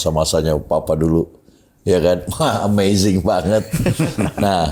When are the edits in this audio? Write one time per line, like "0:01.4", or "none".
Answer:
none